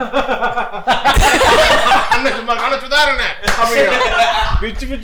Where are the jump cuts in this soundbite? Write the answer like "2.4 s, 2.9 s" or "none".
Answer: none